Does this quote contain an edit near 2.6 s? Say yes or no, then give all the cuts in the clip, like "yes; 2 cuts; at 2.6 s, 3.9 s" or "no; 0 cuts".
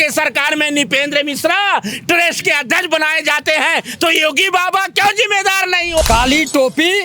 no; 1 cut; at 6.0 s